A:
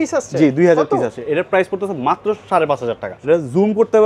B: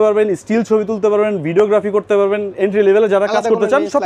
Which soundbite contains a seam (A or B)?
A